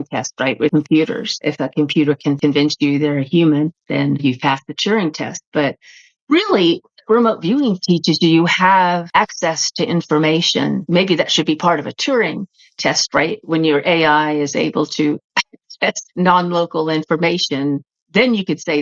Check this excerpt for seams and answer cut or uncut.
cut